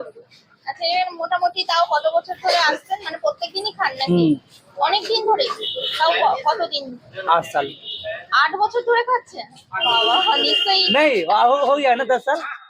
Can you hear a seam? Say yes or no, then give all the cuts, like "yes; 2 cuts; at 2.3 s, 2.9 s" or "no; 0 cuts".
no; 0 cuts